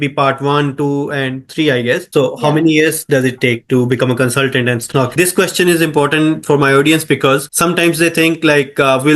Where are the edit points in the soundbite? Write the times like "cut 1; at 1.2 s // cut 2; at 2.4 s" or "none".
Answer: cut 1; at 2.0 s // cut 2; at 4.9 s

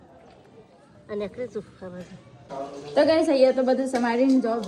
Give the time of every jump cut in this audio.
cut 1; at 2.6 s

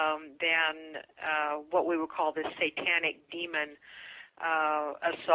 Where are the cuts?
cut 1; at 3.3 s

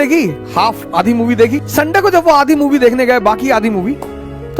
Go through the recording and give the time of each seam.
cut 1; at 1.6 s

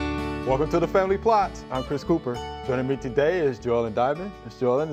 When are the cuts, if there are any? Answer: none

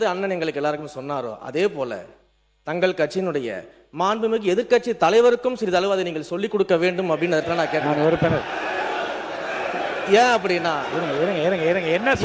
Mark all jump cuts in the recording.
none

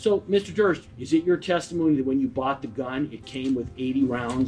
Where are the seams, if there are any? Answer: cut 1; at 0.9 s

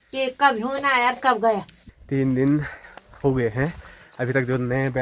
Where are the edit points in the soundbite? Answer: cut 1; at 1.8 s

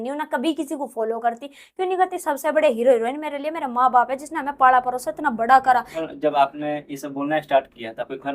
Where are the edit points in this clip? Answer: cut 1; at 6.1 s

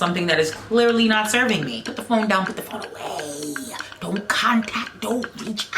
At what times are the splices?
cut 1; at 1.9 s

